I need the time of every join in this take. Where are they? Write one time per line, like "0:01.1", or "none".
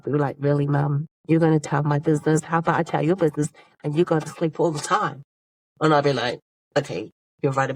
none